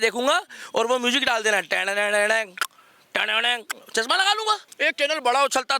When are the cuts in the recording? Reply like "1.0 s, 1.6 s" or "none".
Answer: 4.7 s